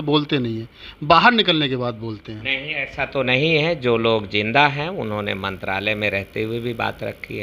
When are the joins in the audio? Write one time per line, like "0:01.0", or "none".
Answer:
none